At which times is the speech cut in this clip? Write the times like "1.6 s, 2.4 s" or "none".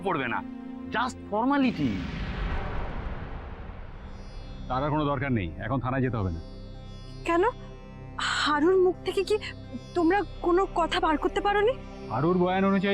2.1 s, 3.7 s